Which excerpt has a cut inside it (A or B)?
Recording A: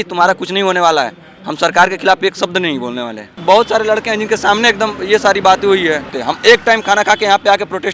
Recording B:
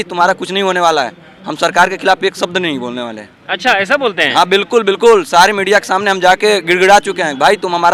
A